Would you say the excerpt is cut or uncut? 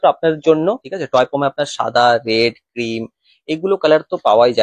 cut